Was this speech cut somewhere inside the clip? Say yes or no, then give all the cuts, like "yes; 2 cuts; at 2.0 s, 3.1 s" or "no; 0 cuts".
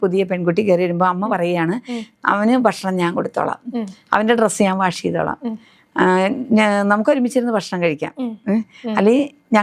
no; 0 cuts